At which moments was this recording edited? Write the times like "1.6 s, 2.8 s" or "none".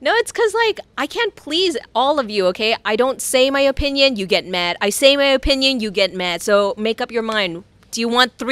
none